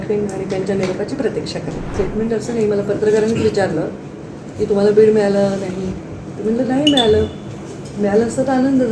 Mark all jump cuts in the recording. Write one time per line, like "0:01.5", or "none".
0:01.8